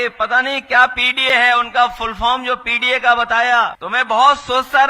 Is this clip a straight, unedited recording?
no; 1 cut; at 3.8 s

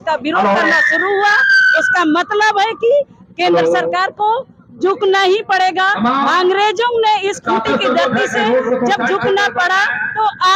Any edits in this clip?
no; 0 cuts

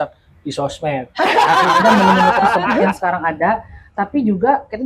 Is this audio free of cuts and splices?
no; 1 cut; at 2.9 s

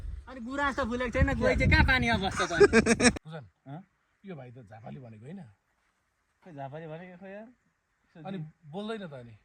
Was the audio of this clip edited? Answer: yes; 1 cut; at 3.2 s

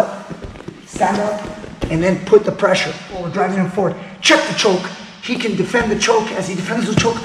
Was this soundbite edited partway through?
yes; 1 cut; at 3.2 s

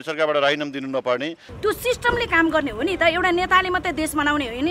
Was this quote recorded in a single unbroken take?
no; 1 cut; at 1.4 s

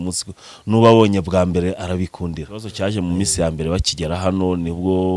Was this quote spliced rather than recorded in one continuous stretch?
yes; 1 cut; at 2.7 s

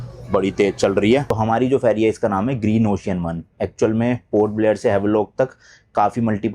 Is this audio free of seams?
no; 1 cut; at 1.4 s

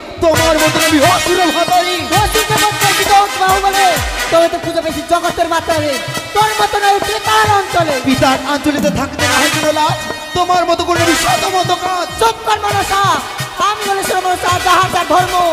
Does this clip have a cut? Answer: no; 0 cuts

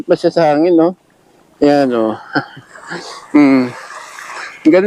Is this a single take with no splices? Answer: yes; 0 cuts

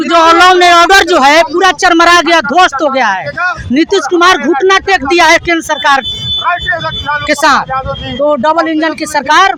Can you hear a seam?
no; 0 cuts

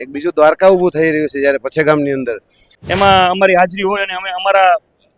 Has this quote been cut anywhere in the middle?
yes; 1 cut; at 2.7 s

